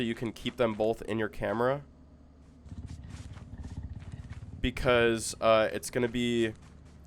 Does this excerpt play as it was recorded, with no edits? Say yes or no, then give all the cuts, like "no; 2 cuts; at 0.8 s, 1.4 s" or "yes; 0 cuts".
yes; 0 cuts